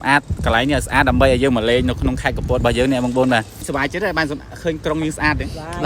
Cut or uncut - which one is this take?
cut